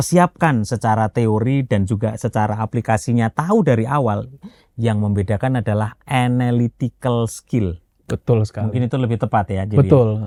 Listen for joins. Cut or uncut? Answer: uncut